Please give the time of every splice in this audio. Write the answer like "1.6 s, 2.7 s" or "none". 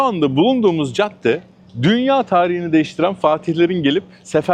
none